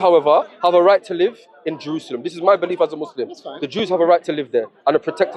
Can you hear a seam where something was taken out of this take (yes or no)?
no